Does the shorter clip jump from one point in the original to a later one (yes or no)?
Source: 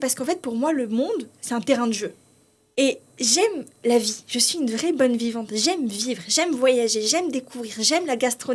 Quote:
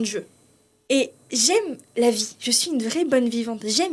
no